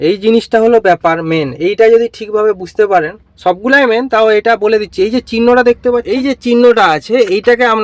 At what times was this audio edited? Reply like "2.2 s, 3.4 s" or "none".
6.1 s